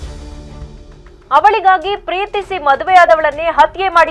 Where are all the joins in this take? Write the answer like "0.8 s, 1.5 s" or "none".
1.2 s